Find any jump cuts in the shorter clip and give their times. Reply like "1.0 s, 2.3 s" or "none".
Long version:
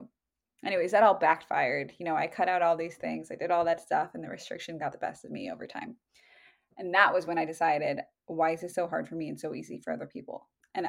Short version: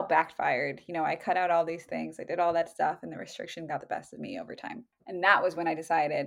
4.9 s